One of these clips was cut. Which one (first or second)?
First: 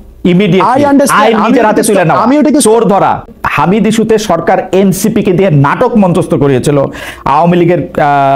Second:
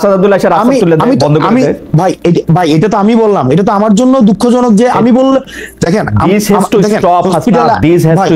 first